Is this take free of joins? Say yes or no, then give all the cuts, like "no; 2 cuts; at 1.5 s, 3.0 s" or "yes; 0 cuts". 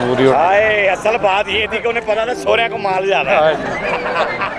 yes; 0 cuts